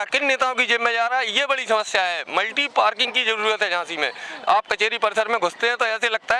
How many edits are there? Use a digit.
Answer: 0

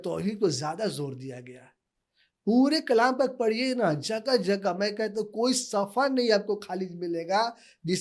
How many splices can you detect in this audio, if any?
0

